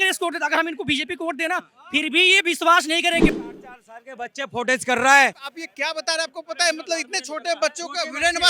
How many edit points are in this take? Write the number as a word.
two